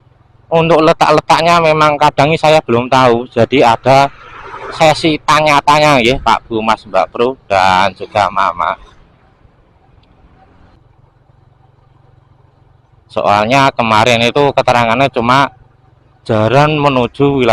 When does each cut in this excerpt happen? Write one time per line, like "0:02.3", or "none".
0:10.8